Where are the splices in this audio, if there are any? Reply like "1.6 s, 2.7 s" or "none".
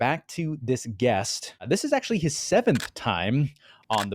1.6 s